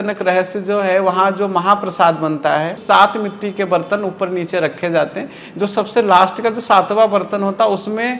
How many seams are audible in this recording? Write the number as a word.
one